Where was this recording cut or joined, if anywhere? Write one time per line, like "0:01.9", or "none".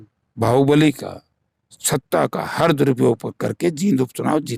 none